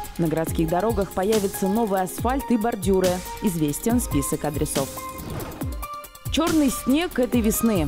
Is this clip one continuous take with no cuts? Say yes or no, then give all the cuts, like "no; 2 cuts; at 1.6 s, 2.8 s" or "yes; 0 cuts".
yes; 0 cuts